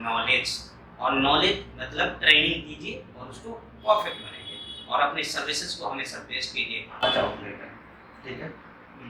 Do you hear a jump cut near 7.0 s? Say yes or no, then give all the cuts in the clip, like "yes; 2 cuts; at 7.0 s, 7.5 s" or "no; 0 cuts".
yes; 1 cut; at 7.0 s